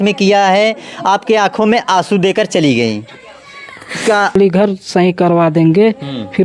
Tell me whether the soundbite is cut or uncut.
cut